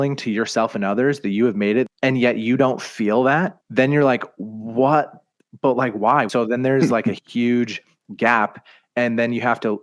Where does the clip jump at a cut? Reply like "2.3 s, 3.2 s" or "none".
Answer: 1.9 s, 3.6 s, 6.3 s